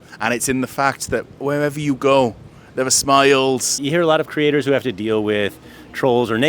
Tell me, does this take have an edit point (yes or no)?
yes